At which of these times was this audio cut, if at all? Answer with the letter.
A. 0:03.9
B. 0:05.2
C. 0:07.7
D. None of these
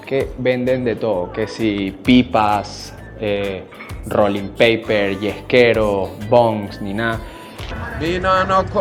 C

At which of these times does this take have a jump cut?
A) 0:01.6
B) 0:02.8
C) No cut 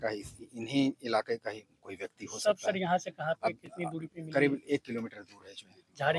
C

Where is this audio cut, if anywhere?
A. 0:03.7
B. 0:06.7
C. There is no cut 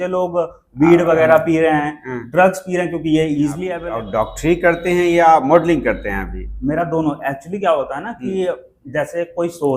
A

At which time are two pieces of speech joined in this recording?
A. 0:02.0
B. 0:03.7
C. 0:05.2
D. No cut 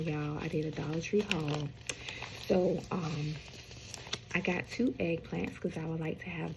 D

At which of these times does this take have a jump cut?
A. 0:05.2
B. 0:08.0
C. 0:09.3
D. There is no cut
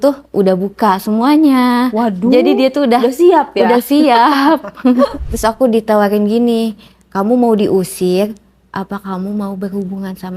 A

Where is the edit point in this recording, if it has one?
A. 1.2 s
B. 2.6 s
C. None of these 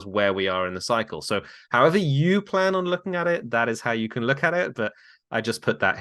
C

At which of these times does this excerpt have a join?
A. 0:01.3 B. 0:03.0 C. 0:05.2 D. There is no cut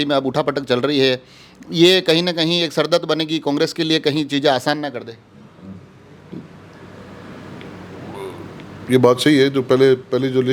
D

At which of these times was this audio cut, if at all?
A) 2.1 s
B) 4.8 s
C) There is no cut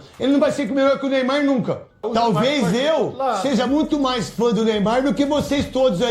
A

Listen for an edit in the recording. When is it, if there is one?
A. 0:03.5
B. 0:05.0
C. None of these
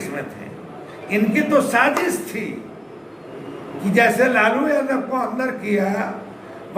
C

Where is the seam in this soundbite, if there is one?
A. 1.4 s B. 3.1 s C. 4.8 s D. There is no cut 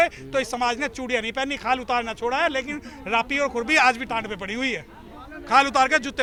D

